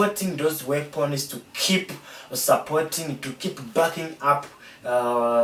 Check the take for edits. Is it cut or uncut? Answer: uncut